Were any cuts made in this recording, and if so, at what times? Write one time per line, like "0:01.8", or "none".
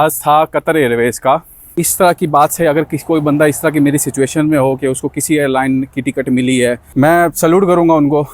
0:01.8
0:06.8